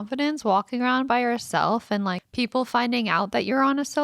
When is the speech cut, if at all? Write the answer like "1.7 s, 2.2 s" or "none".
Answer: 2.2 s